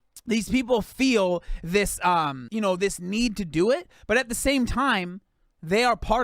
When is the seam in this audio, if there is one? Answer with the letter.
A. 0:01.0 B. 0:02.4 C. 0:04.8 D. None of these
B